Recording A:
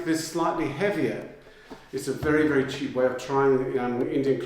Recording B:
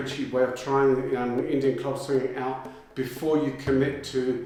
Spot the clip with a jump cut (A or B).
A